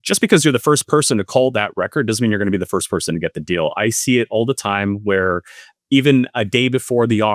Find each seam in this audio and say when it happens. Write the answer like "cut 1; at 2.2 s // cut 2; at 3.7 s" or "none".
none